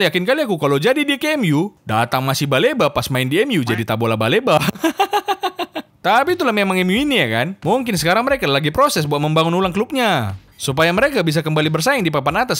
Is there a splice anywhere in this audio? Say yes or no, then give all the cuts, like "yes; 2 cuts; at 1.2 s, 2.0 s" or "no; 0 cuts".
no; 0 cuts